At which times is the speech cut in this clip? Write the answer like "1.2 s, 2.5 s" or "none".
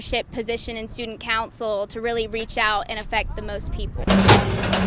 3.9 s